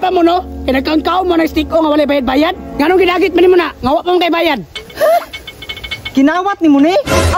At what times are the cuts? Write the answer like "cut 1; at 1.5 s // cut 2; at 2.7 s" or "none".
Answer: none